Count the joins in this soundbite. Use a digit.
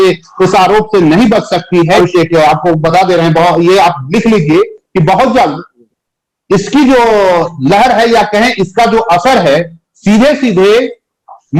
1